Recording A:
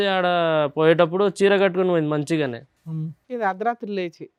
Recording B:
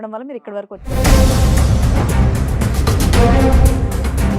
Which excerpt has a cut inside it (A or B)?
B